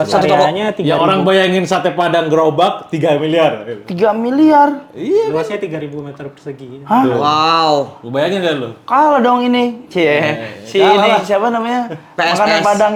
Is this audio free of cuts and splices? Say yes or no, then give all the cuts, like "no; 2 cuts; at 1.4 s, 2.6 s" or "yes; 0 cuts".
yes; 0 cuts